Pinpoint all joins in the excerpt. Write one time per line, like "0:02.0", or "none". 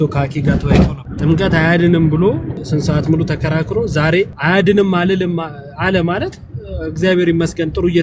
0:01.0
0:02.6
0:04.4